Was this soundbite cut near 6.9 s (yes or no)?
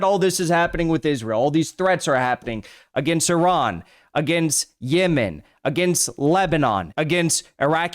yes